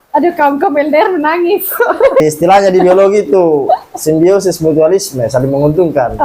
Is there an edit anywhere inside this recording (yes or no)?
yes